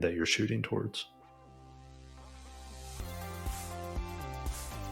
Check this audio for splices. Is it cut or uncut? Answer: cut